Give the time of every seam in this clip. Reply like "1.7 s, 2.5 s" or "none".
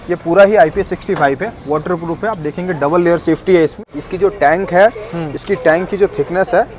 3.9 s